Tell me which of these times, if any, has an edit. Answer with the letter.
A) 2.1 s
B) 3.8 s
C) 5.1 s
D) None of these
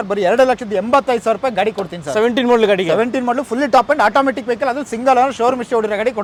D